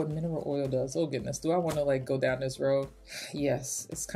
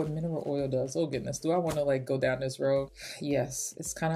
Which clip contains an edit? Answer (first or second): second